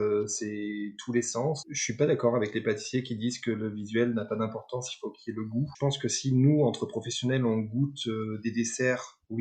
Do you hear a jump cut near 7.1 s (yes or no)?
no